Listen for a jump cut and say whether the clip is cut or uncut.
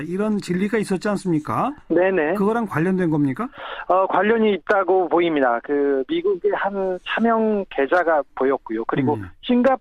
uncut